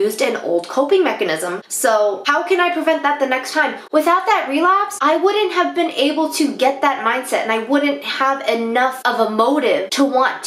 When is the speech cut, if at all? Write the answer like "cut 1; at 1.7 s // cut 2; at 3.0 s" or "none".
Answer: cut 1; at 2.2 s // cut 2; at 4.9 s // cut 3; at 9.0 s